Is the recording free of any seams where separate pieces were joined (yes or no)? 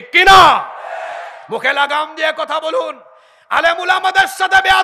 yes